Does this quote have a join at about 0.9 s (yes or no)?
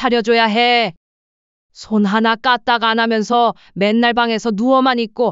yes